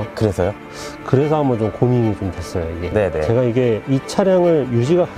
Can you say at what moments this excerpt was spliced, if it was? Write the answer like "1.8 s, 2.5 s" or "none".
2.9 s